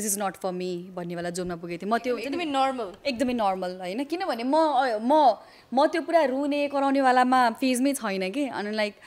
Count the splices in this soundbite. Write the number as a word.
zero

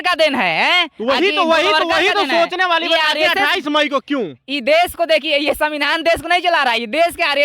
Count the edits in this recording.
zero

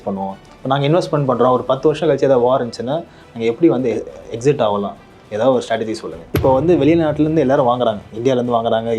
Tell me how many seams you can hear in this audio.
one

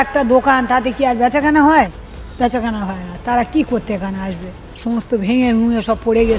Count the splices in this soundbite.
one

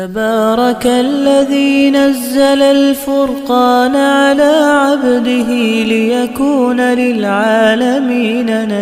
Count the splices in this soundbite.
zero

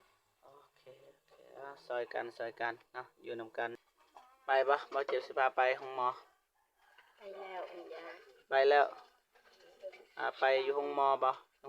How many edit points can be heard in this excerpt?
one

